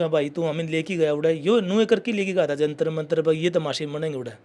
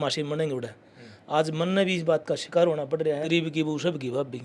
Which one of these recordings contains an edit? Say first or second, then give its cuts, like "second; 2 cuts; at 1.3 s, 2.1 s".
second; 1 cut; at 3.2 s